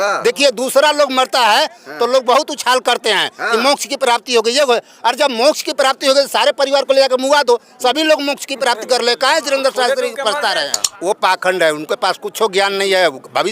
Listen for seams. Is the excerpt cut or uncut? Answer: cut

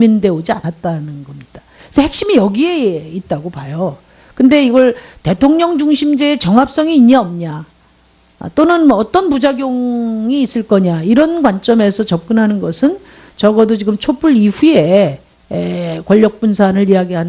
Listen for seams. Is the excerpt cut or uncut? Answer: cut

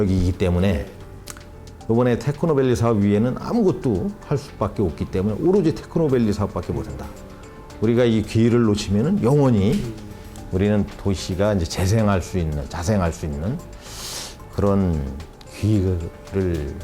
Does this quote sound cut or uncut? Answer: uncut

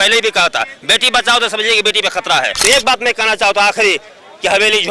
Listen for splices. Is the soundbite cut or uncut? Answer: cut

